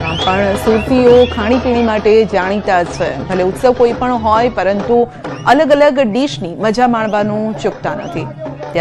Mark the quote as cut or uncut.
uncut